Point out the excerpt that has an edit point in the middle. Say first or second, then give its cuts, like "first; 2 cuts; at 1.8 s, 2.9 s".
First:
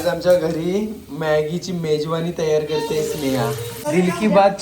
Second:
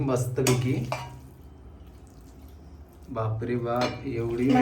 first; 1 cut; at 3.7 s